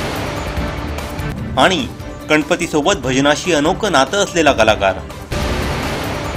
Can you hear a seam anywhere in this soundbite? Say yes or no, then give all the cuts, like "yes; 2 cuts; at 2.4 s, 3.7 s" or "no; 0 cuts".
yes; 2 cuts; at 1.4 s, 5.2 s